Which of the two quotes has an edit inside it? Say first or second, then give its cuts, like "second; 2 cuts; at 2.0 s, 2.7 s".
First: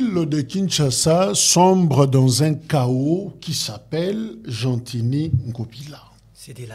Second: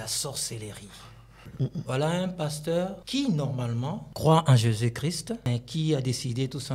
second; 4 cuts; at 1.5 s, 3.0 s, 4.1 s, 5.4 s